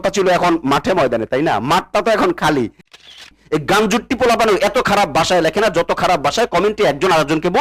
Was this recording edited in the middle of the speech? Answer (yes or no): yes